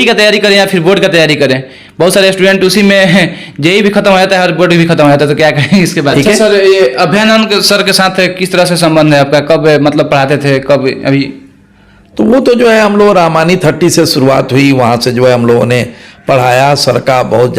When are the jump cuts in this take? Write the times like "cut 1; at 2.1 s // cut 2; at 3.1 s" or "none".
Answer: cut 1; at 6.1 s

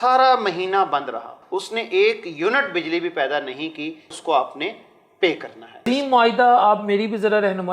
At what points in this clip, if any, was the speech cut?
cut 1; at 1.4 s // cut 2; at 4.1 s // cut 3; at 5.8 s

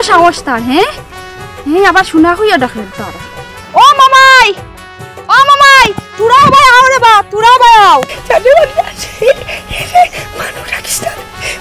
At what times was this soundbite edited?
none

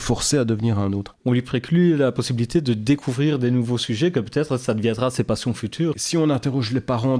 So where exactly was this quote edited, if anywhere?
cut 1; at 1.1 s // cut 2; at 6.0 s

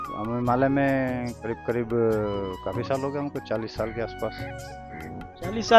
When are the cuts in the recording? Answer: cut 1; at 1.4 s

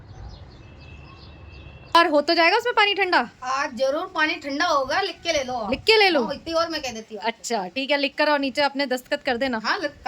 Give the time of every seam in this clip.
cut 1; at 1.7 s

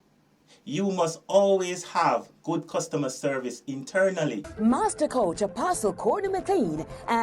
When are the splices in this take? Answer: cut 1; at 4.5 s

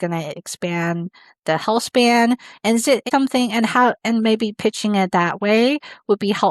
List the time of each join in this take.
cut 1; at 3.0 s

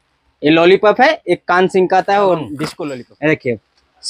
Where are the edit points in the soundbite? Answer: cut 1; at 2.6 s

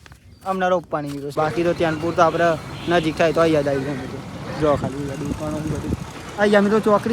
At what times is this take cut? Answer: cut 1; at 1.3 s

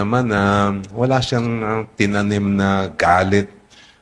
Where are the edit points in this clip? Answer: cut 1; at 2.1 s

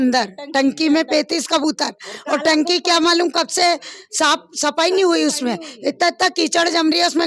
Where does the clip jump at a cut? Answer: none

